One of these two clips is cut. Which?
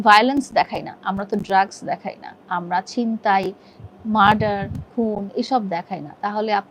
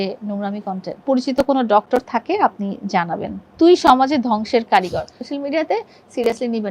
second; 3 cuts; at 1.0 s, 3.4 s, 5.2 s

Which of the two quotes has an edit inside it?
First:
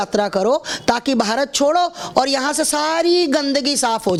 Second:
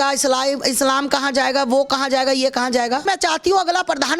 second; 1 cut; at 3.0 s

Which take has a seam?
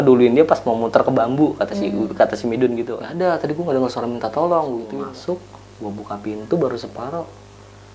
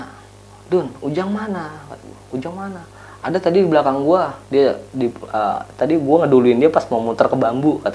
first; 2 cuts; at 3.0 s, 4.9 s

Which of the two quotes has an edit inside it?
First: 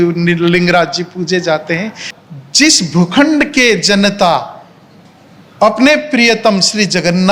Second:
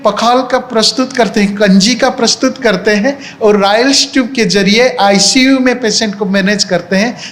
first; 1 cut; at 2.0 s

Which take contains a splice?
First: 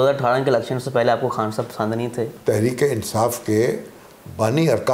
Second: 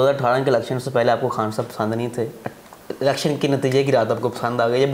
first; 1 cut; at 2.3 s

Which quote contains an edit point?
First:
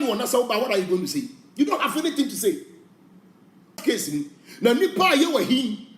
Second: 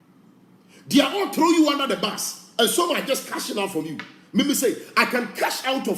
first; 1 cut; at 3.8 s

